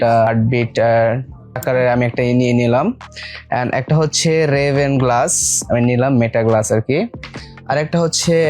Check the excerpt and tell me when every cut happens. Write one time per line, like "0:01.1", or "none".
0:01.6